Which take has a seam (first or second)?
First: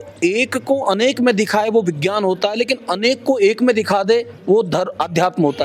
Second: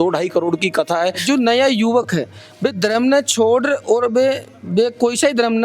second